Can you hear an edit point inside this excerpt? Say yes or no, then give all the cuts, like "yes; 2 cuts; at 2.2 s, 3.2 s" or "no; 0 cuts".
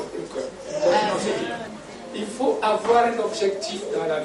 yes; 1 cut; at 1.7 s